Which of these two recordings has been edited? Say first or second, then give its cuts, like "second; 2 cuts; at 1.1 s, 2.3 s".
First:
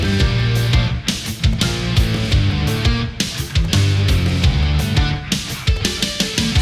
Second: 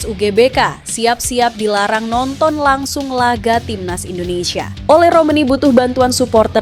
second; 1 cut; at 4.7 s